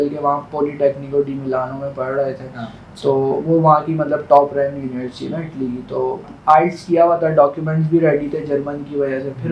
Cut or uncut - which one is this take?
cut